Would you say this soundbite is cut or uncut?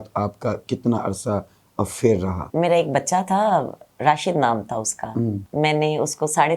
cut